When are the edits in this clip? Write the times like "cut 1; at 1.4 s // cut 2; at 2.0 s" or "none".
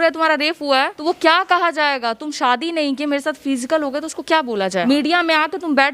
cut 1; at 1.0 s // cut 2; at 4.8 s